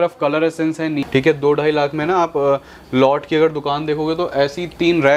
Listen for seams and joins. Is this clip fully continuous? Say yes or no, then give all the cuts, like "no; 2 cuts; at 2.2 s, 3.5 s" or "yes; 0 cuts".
no; 1 cut; at 1.0 s